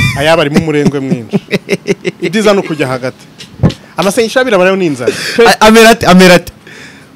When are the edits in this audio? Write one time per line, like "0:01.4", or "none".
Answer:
none